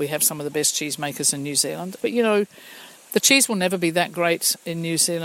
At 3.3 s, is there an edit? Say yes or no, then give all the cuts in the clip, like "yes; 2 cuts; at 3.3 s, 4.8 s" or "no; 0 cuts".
no; 1 cut; at 2.0 s